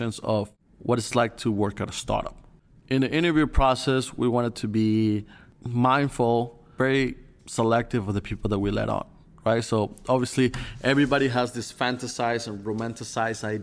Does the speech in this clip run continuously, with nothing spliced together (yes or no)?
no